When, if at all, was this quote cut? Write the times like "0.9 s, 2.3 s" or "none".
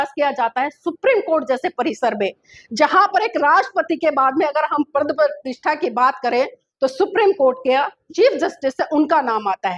8.0 s